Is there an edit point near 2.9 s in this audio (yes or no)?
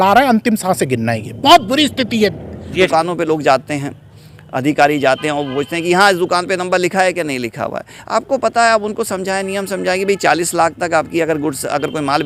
yes